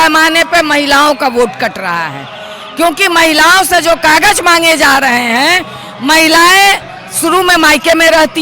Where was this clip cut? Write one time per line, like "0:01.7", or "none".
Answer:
none

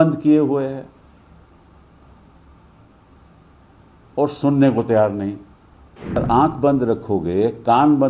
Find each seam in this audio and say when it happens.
0:06.2

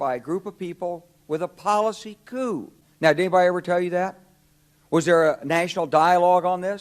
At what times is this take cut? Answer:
0:02.8

